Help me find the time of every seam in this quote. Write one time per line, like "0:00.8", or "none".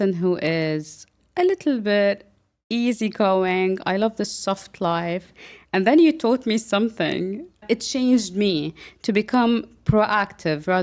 0:07.6